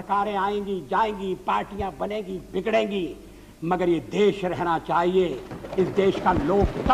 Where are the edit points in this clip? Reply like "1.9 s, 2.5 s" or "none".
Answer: none